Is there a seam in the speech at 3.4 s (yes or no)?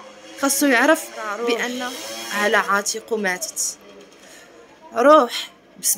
no